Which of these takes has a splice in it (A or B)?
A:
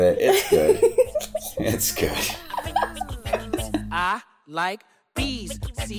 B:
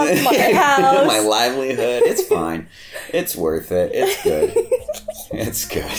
A